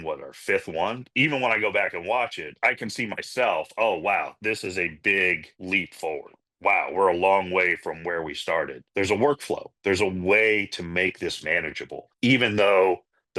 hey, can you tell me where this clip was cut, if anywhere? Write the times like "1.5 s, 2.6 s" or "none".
1.0 s, 2.5 s, 6.4 s, 8.8 s